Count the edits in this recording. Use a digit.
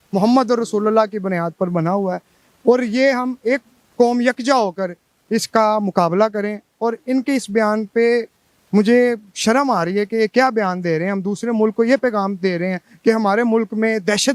0